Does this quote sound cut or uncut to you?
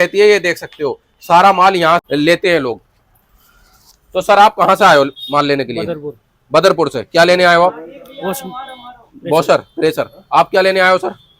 cut